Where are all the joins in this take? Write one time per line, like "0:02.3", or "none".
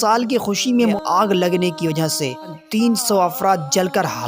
0:01.0
0:02.6